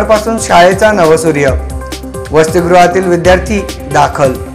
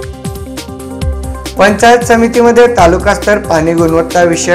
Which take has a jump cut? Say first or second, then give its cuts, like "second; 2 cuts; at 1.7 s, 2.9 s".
second; 1 cut; at 1.0 s